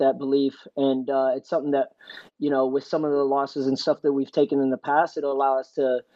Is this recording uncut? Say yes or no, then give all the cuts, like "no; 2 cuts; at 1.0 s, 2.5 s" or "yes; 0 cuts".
yes; 0 cuts